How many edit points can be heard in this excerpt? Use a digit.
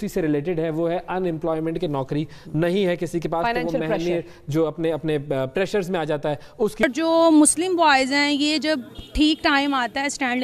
1